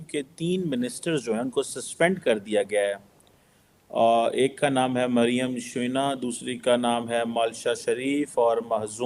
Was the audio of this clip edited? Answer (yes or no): no